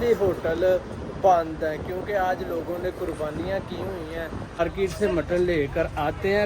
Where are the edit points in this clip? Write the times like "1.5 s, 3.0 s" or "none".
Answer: 4.6 s

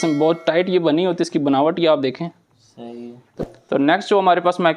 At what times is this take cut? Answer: 3.4 s

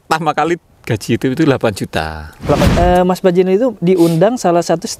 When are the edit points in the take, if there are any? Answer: 2.7 s

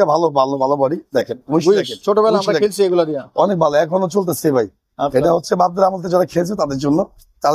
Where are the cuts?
none

